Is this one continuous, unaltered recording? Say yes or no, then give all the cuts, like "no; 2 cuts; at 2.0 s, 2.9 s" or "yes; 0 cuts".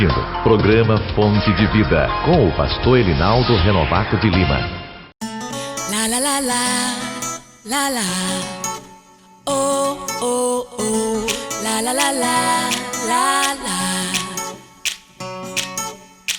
no; 1 cut; at 5.0 s